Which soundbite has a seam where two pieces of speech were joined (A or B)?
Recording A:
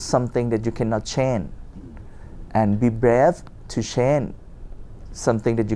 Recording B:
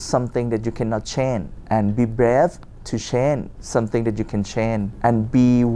B